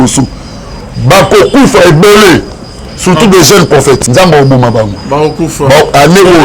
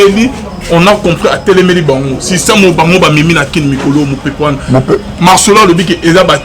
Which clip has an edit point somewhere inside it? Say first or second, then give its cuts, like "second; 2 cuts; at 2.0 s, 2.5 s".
first; 1 cut; at 4.0 s